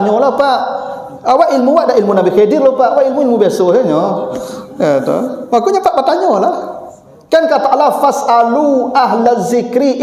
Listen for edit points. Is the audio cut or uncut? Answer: uncut